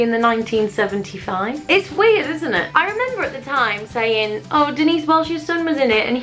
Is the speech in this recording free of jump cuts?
yes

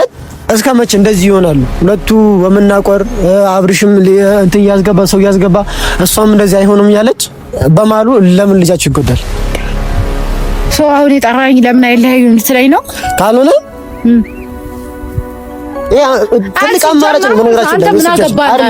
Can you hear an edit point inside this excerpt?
no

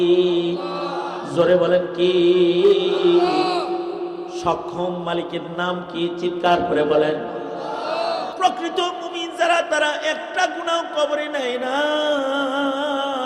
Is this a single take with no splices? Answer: no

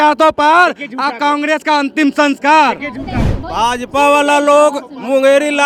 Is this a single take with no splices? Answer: yes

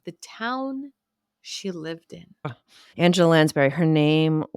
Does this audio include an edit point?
yes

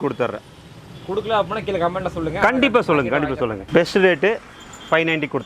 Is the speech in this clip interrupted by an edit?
yes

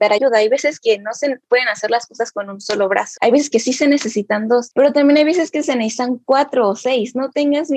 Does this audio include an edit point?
no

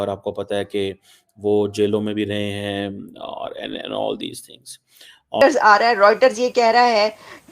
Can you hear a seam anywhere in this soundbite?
yes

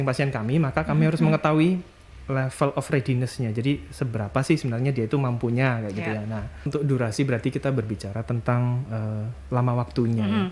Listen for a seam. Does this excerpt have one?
yes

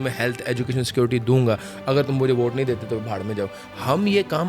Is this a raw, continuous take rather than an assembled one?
yes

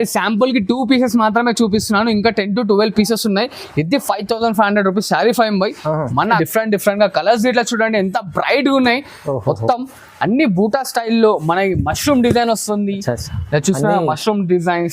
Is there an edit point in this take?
yes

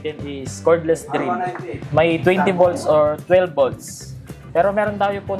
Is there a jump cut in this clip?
no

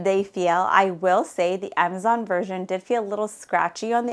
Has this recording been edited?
no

